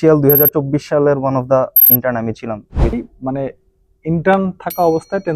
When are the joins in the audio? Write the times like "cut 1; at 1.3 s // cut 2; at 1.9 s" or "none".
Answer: cut 1; at 3.1 s